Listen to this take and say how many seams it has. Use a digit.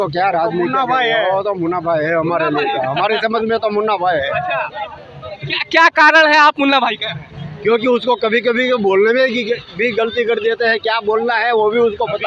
0